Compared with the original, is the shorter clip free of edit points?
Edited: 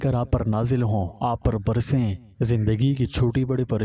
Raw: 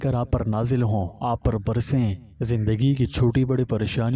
yes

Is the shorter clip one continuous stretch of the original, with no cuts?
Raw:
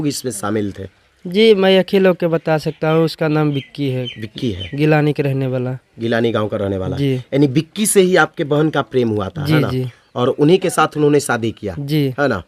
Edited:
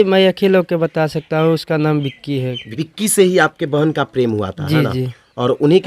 no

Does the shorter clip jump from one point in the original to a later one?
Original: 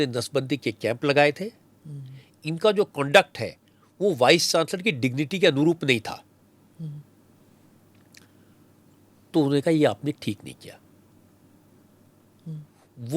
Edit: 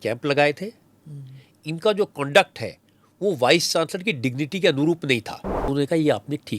yes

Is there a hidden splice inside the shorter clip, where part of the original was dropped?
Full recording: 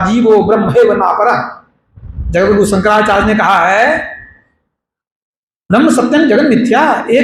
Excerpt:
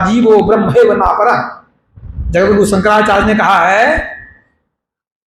no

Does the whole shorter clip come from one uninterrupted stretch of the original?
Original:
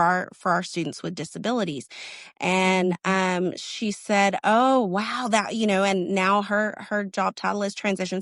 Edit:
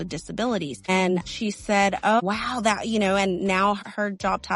no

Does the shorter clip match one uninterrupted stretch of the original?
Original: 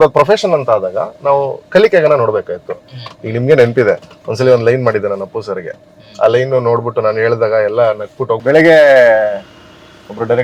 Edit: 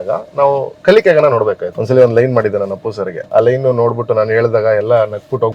no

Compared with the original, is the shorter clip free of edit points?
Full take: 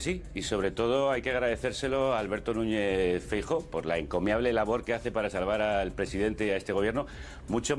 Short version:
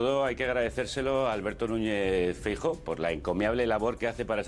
yes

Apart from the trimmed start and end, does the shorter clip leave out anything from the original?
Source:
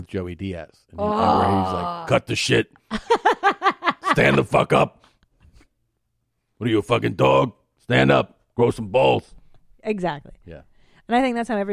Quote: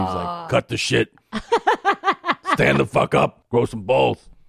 yes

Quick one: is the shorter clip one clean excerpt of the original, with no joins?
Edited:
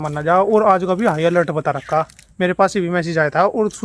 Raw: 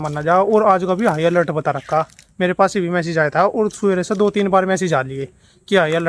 yes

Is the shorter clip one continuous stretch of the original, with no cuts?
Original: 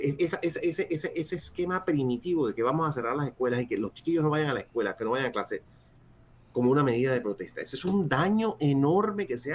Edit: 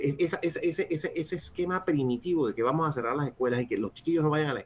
yes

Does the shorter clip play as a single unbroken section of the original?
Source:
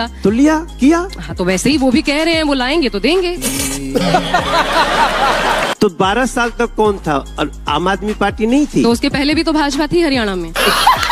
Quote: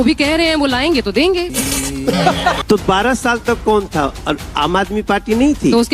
no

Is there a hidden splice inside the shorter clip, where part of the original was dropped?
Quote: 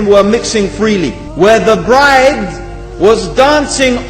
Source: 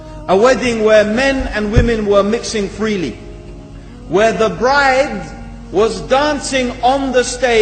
yes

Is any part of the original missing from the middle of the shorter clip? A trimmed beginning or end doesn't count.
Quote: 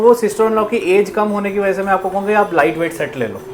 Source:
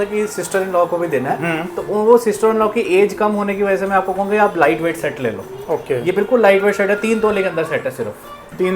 no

